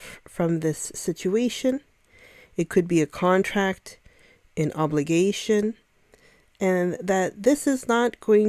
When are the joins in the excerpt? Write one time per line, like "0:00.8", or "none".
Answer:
none